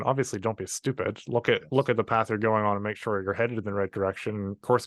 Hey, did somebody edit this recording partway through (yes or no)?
no